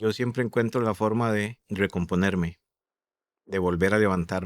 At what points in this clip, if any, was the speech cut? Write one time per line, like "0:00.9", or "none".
0:01.6